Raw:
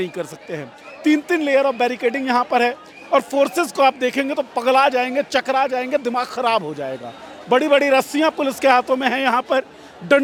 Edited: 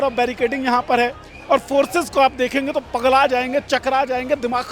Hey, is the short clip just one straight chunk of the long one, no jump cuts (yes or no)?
yes